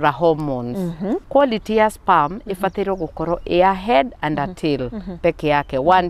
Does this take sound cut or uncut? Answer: cut